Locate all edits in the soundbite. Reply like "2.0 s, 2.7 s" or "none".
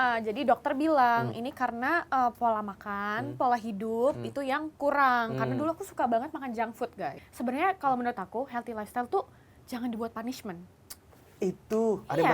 7.1 s